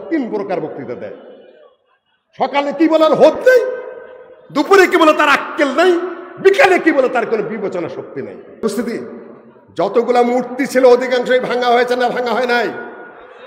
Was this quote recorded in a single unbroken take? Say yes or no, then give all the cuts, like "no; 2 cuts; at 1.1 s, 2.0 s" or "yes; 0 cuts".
no; 1 cut; at 8.6 s